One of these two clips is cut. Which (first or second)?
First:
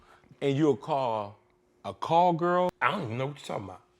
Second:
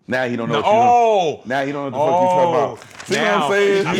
first